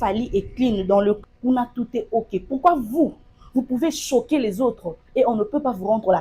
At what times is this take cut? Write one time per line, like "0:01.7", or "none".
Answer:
0:01.2